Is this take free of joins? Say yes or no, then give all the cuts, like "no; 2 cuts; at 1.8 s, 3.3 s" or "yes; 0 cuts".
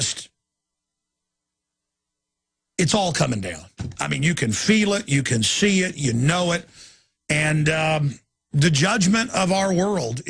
yes; 0 cuts